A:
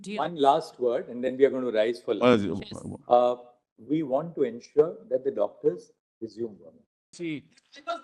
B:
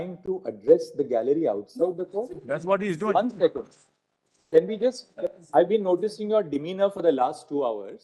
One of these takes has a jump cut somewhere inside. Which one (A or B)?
A